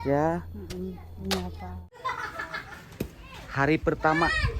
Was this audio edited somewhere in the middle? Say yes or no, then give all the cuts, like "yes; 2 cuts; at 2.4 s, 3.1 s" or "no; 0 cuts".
yes; 1 cut; at 2.0 s